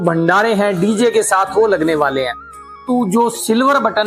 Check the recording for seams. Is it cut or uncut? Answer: cut